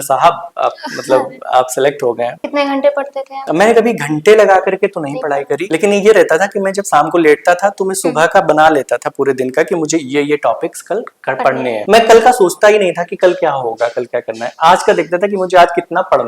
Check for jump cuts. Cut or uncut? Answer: cut